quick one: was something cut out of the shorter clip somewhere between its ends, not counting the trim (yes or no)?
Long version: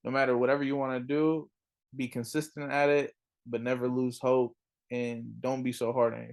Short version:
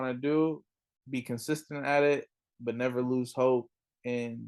no